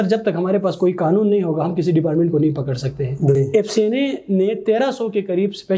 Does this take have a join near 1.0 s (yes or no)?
no